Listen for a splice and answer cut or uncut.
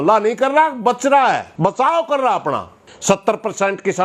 cut